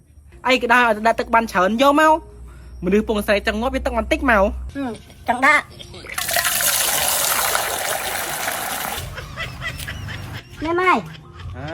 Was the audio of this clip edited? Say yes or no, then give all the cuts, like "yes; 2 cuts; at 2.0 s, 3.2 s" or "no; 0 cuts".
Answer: yes; 2 cuts; at 4.7 s, 9.0 s